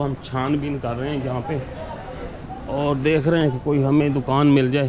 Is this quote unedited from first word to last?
yes; 0 cuts

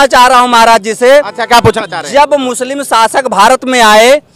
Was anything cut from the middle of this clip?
no; 0 cuts

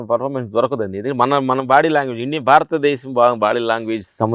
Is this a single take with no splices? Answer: yes; 0 cuts

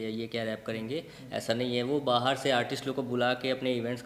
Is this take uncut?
yes; 0 cuts

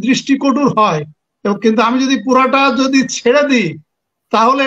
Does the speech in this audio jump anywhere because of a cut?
no; 0 cuts

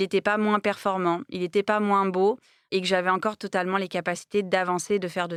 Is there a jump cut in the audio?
no; 0 cuts

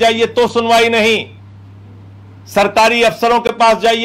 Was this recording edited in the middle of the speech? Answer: no; 0 cuts

